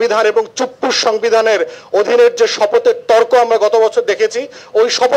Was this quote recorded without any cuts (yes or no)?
yes